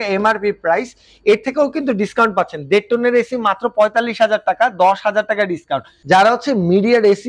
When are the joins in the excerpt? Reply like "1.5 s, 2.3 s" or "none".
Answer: 6.0 s

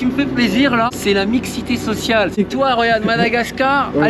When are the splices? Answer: 0.9 s, 2.4 s

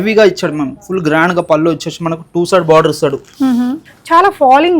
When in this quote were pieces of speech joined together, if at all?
3.8 s

